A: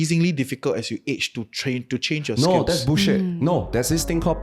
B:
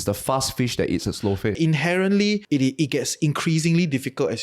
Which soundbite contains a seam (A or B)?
B